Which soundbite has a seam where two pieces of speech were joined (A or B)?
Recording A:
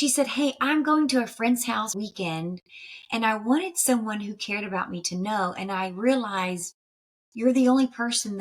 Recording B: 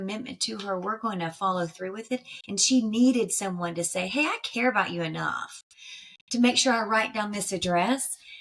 A